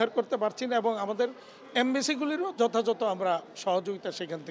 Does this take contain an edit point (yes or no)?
no